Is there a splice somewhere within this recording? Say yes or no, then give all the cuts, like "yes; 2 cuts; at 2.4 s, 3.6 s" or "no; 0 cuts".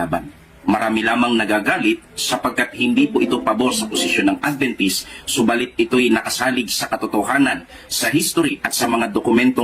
yes; 1 cut; at 7.7 s